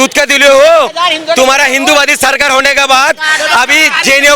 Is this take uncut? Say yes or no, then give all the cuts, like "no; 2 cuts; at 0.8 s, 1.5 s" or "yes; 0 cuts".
yes; 0 cuts